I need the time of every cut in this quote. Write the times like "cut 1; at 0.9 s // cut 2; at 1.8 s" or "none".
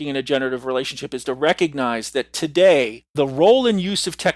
cut 1; at 3.0 s

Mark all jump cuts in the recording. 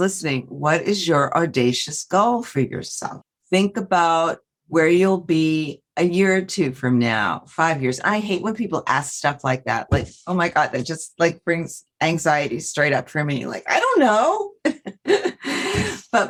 none

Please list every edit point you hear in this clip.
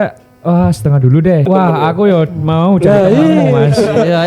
cut 1; at 1.5 s

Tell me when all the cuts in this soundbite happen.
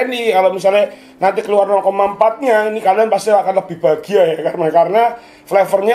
none

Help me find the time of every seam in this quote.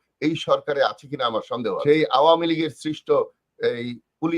cut 1; at 1.8 s

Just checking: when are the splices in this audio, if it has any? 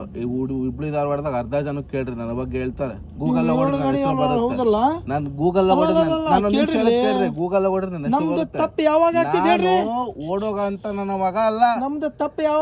none

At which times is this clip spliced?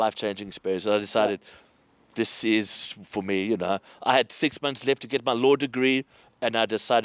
none

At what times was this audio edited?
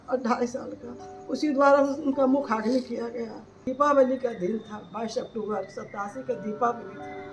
cut 1; at 3.7 s

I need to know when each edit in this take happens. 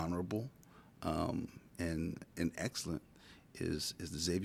none

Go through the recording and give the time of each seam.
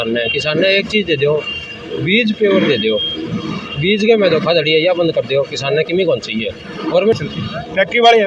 cut 1; at 7.2 s

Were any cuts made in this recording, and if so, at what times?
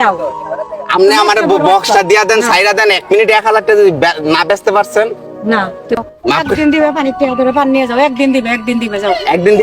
cut 1; at 6.0 s

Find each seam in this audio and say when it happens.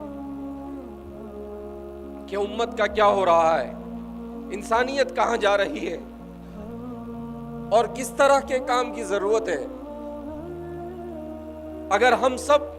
cut 1; at 6.0 s // cut 2; at 7.4 s // cut 3; at 9.7 s // cut 4; at 11.9 s

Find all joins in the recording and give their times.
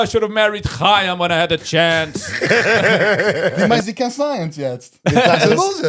cut 1; at 3.6 s

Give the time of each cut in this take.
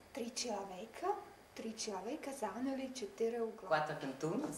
cut 1; at 3.6 s

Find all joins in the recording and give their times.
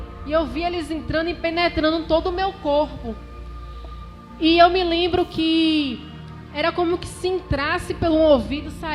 none

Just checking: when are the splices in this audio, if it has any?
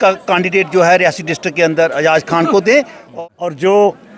cut 1; at 3.0 s

